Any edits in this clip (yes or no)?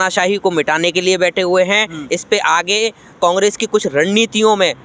no